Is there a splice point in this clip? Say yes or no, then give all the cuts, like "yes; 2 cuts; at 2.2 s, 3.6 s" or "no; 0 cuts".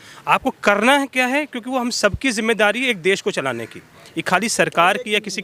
no; 0 cuts